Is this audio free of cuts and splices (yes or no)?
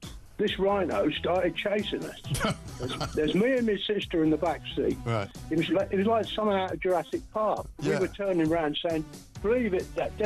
no